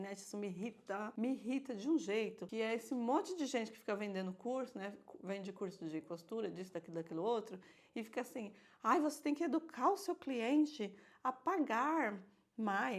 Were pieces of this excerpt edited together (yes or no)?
yes